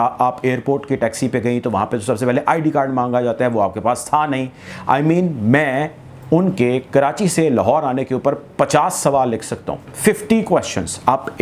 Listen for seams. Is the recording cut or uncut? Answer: uncut